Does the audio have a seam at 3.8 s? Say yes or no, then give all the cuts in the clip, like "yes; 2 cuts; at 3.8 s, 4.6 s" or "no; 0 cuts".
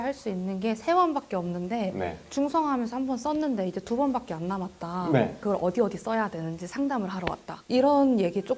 no; 2 cuts; at 5.4 s, 7.6 s